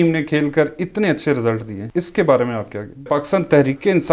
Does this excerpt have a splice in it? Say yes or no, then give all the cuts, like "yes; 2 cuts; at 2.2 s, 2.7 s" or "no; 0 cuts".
yes; 2 cuts; at 1.8 s, 3.1 s